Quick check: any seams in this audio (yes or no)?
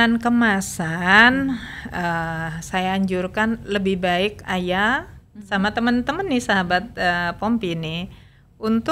no